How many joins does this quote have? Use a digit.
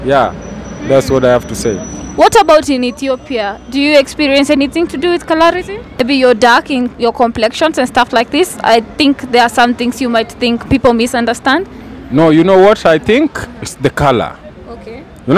1